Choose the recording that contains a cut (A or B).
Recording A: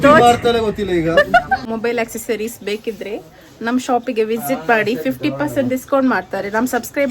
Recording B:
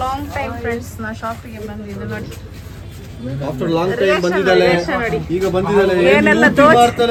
A